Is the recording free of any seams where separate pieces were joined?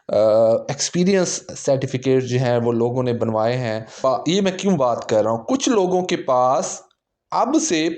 no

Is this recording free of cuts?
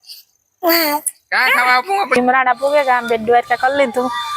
no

